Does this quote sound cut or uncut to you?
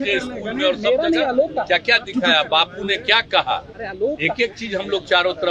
uncut